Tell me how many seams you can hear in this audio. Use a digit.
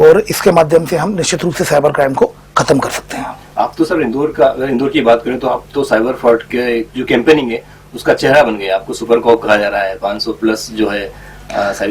0